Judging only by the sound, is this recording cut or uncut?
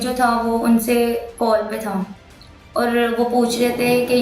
uncut